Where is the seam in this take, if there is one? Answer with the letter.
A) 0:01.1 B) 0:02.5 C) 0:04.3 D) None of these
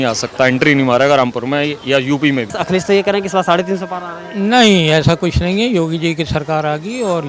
B